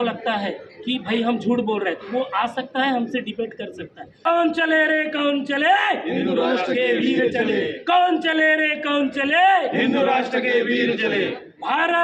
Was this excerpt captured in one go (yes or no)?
no